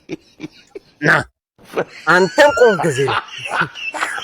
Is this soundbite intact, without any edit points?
yes; 0 cuts

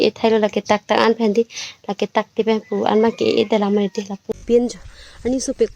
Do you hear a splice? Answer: yes; 1 cut; at 4.4 s

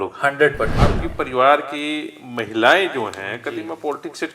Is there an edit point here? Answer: yes; 1 cut; at 1.0 s

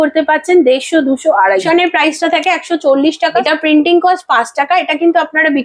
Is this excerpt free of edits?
no; 2 cuts; at 1.6 s, 3.4 s

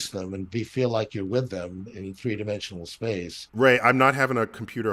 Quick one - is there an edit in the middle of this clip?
yes; 1 cut; at 3.6 s

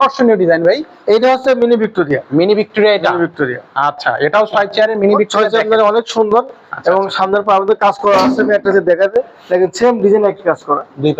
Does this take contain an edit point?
no; 0 cuts

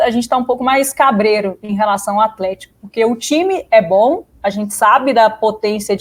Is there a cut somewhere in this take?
no; 0 cuts

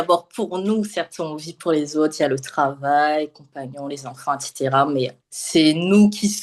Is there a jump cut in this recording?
no; 0 cuts

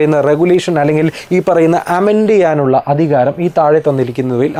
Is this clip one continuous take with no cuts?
yes; 0 cuts

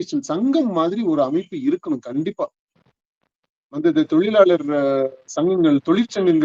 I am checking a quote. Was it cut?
no; 0 cuts

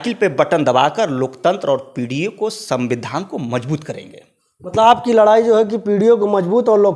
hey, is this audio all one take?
yes; 0 cuts

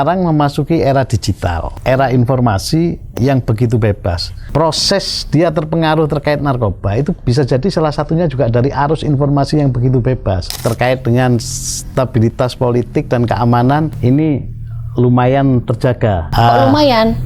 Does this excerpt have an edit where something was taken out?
yes; 5 cuts; at 1.7 s, 4.4 s, 10.5 s, 13.9 s, 16.2 s

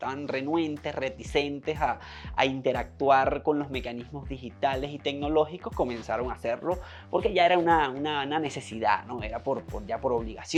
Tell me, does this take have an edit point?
no; 0 cuts

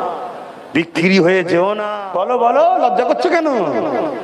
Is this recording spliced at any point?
yes; 1 cut; at 1.9 s

